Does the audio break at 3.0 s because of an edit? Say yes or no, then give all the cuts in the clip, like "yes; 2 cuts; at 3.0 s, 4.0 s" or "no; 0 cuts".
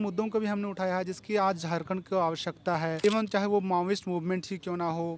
yes; 1 cut; at 3.0 s